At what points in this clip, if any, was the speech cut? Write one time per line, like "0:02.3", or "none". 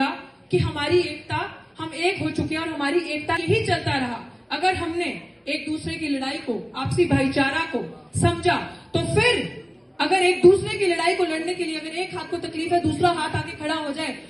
0:03.4